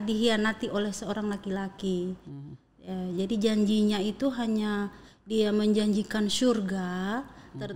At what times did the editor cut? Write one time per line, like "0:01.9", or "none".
none